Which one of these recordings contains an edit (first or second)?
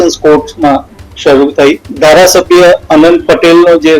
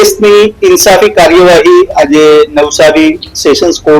first